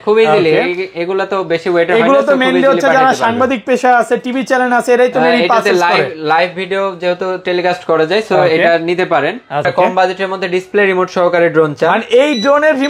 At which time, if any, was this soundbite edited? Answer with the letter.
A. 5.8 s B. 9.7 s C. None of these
B